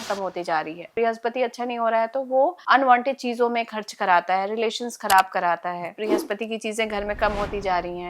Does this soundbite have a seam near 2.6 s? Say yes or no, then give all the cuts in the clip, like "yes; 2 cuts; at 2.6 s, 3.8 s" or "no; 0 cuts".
yes; 3 cuts; at 0.9 s, 2.6 s, 6.0 s